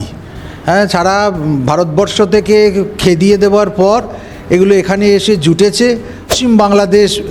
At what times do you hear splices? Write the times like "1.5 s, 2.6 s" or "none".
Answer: 6.3 s